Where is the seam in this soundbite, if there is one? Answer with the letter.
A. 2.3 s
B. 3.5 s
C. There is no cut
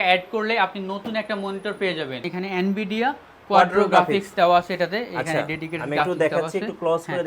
A